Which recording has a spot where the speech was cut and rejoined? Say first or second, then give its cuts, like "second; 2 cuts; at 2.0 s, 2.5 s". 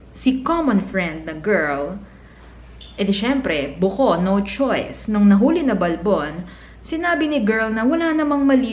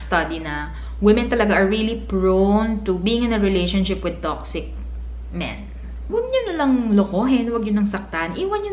second; 1 cut; at 6.0 s